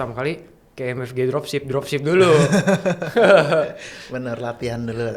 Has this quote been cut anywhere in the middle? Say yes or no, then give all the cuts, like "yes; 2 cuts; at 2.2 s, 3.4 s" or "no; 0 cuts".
no; 0 cuts